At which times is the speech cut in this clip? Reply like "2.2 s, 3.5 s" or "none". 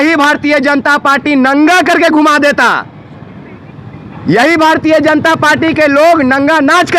none